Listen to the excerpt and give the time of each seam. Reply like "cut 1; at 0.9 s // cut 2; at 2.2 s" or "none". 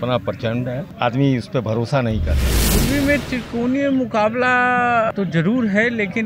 cut 1; at 0.9 s // cut 2; at 2.6 s // cut 3; at 5.1 s